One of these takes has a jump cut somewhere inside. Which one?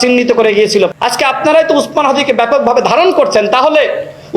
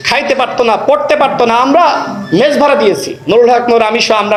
first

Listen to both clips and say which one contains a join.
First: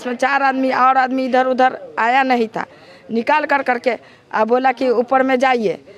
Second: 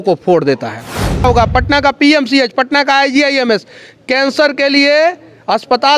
second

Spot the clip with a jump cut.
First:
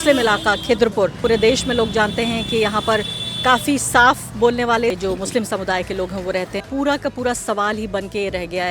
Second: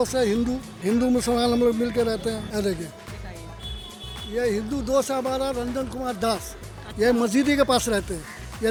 first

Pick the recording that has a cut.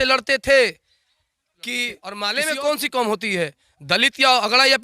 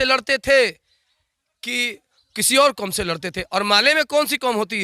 first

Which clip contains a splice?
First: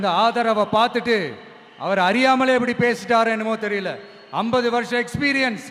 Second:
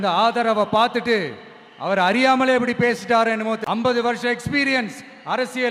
second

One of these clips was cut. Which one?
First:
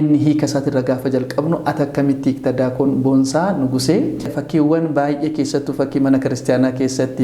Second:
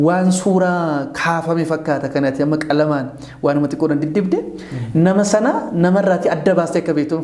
first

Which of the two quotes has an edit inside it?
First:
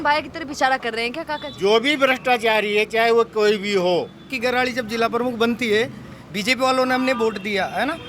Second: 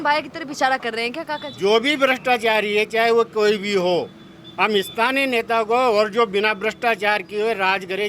first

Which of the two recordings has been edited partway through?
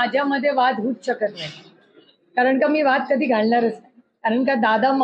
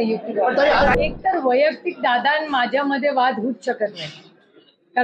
second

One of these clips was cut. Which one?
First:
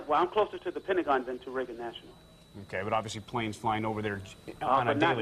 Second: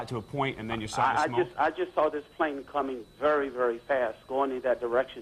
second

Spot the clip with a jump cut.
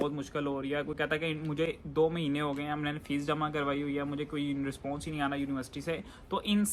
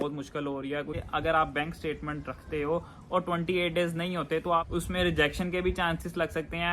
second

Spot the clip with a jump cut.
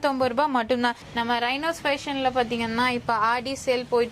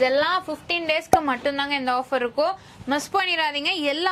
first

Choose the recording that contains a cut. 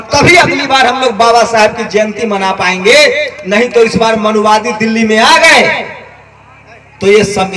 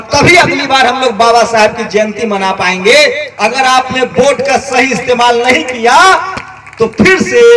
second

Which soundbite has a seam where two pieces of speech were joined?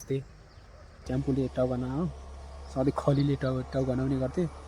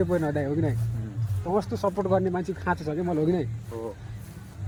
first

